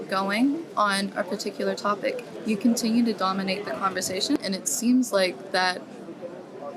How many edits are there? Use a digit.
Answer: 1